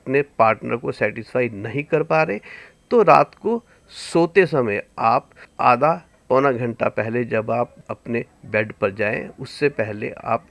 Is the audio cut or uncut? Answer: cut